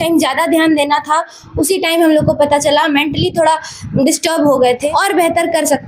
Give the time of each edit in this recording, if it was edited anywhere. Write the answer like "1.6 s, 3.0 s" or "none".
4.8 s